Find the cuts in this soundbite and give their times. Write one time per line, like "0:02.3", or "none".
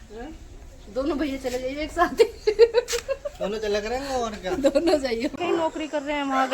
0:05.4